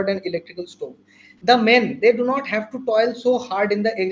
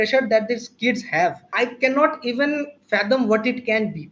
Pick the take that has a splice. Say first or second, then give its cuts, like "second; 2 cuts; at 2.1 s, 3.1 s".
second; 1 cut; at 1.4 s